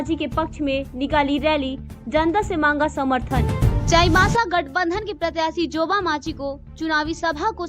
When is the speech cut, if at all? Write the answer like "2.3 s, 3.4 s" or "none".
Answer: 3.7 s